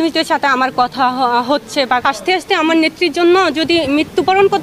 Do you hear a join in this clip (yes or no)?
yes